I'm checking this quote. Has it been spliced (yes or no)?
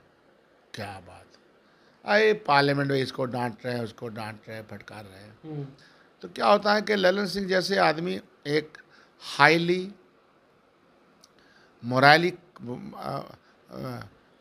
no